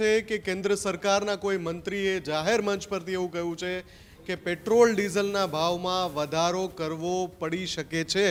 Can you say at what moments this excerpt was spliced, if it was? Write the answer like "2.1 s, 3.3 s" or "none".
none